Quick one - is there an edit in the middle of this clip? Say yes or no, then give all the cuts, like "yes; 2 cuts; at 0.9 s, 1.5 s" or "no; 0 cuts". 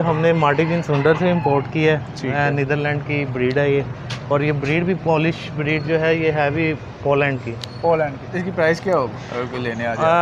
no; 0 cuts